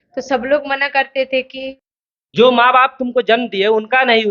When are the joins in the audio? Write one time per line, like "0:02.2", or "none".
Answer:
0:01.8